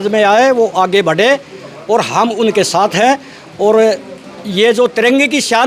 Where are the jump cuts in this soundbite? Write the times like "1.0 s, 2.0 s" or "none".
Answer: none